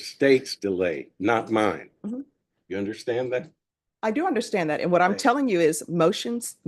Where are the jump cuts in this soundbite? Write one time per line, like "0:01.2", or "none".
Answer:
none